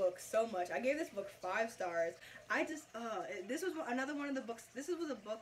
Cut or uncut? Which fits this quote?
uncut